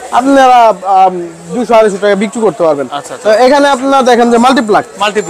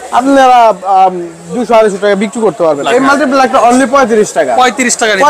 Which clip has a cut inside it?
second; 1 cut; at 2.8 s

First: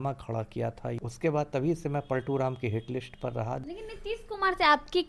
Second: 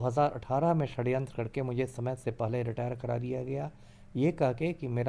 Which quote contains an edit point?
first; 2 cuts; at 1.0 s, 3.6 s

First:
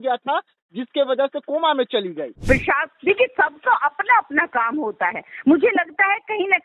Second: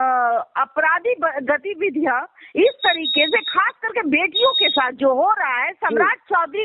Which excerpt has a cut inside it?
first; 1 cut; at 2.3 s

